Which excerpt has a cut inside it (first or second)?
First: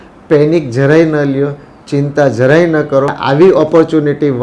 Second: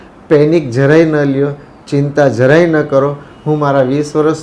first